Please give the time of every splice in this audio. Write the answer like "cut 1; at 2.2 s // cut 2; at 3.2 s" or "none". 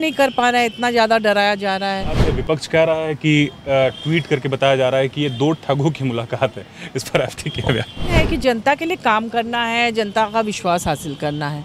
cut 1; at 2.2 s // cut 2; at 8.1 s

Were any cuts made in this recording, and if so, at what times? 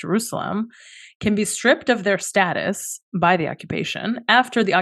none

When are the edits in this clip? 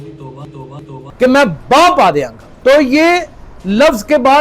cut 1; at 0.9 s // cut 2; at 2.4 s

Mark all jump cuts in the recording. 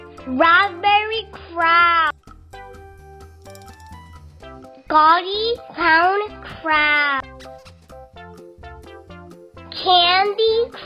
none

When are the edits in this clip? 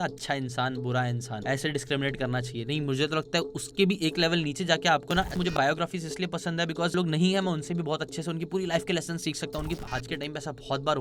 cut 1; at 1.3 s // cut 2; at 5.5 s // cut 3; at 6.9 s // cut 4; at 9.6 s

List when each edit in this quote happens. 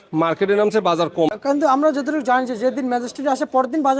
cut 1; at 1.4 s

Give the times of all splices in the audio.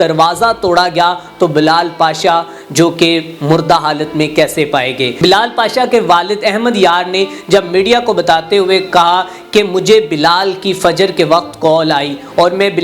cut 1; at 5.2 s

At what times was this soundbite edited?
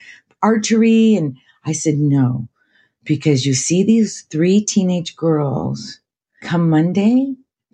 cut 1; at 6.4 s

